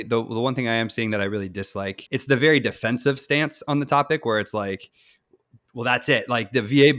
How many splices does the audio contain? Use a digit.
1